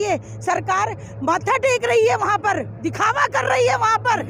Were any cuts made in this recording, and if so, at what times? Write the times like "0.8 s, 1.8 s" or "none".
none